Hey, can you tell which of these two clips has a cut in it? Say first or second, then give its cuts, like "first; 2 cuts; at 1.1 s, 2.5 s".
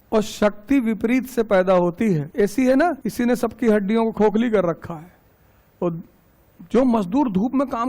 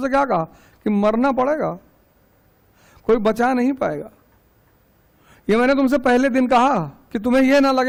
first; 2 cuts; at 2.3 s, 3.0 s